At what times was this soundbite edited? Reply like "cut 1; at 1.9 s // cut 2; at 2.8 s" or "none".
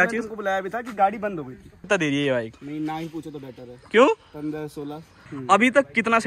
cut 1; at 1.9 s // cut 2; at 5.2 s